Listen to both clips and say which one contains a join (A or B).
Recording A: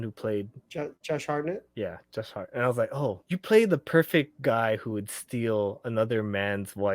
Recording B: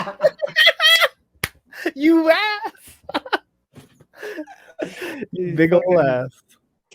A